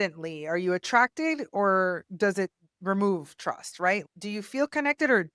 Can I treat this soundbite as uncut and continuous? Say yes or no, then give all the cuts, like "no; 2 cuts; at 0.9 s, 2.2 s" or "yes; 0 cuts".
no; 1 cut; at 4.0 s